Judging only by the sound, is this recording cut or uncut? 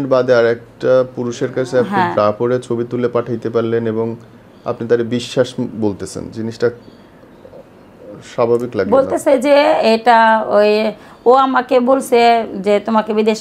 uncut